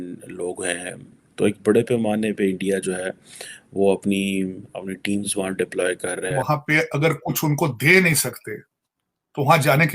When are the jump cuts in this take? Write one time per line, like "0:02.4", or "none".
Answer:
0:06.4